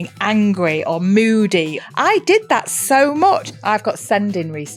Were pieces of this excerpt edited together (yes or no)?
yes